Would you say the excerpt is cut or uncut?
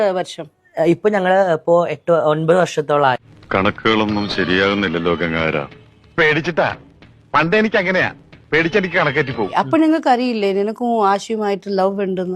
cut